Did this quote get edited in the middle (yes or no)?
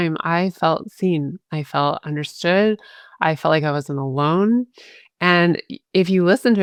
no